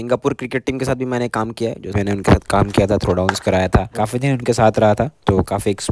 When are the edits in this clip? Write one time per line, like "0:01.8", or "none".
0:01.9